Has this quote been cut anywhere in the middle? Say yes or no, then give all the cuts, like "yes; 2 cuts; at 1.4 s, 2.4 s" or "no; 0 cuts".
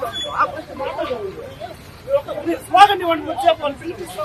yes; 1 cut; at 1.4 s